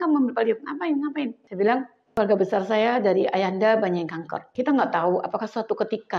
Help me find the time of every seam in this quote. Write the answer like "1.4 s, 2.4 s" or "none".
1.4 s, 2.0 s, 4.4 s